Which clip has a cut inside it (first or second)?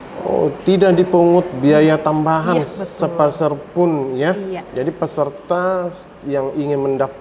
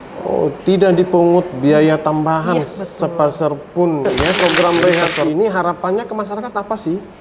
second